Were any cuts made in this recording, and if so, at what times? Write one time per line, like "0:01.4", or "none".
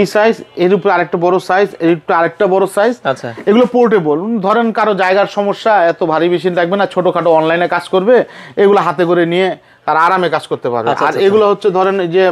none